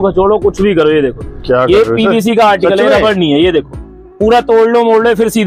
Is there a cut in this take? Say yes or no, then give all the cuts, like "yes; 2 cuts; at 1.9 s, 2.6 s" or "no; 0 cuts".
no; 0 cuts